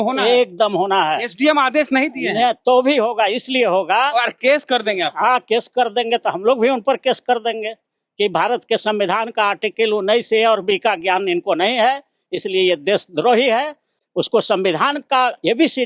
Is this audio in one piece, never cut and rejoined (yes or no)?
no